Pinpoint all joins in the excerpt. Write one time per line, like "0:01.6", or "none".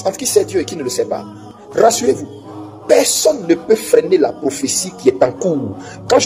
0:01.6